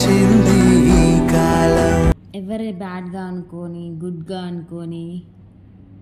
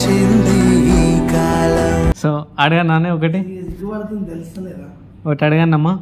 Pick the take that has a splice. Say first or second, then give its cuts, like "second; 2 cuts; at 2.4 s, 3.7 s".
first; 1 cut; at 2.2 s